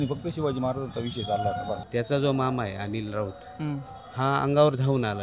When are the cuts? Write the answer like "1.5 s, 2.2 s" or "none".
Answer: 1.8 s